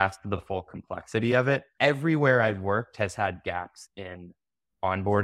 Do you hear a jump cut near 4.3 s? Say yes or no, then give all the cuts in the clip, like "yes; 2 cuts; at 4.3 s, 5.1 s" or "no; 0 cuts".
no; 1 cut; at 1.8 s